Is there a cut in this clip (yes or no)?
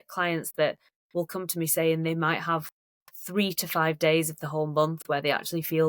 no